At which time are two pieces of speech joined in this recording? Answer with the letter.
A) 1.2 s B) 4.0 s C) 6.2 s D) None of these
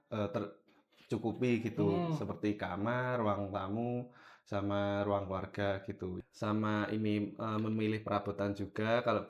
C